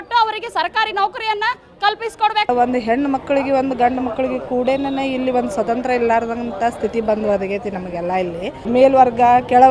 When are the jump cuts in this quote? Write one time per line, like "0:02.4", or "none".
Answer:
0:02.5
0:08.6